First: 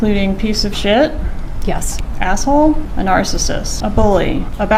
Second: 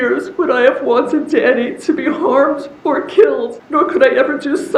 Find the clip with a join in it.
second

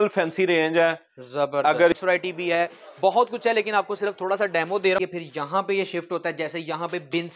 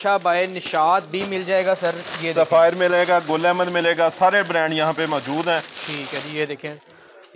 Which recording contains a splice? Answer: first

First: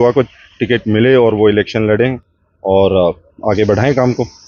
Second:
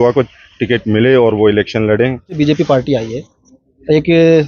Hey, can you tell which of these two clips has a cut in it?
second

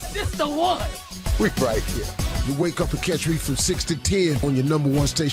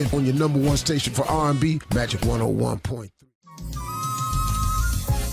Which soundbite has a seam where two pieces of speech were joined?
second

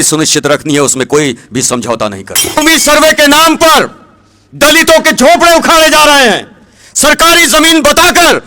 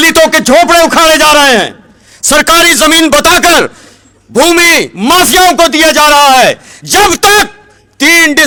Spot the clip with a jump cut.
first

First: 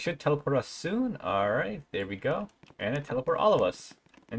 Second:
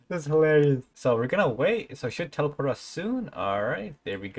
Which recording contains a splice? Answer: second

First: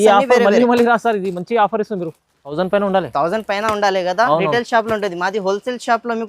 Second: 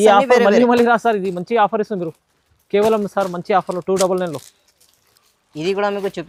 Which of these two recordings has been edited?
first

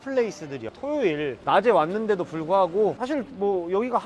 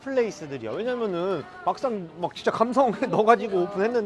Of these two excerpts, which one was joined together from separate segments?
first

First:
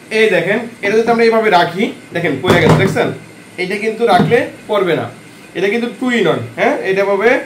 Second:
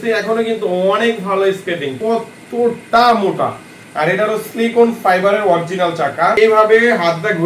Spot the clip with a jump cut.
second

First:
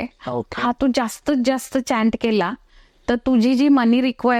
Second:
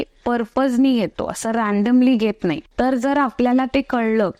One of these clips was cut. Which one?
second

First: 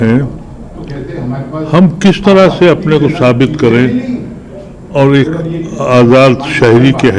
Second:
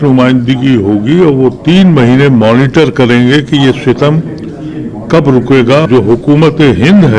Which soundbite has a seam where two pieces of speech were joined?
second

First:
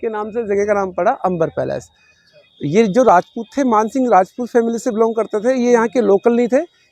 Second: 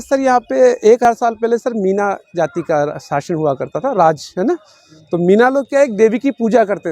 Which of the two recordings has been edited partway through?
second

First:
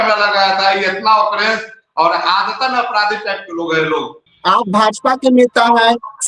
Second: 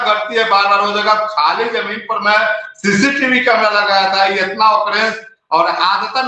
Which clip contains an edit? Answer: first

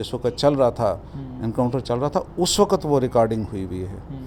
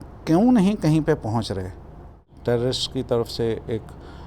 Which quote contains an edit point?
second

